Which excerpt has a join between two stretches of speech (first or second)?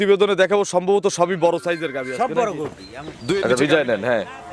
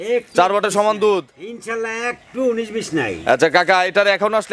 first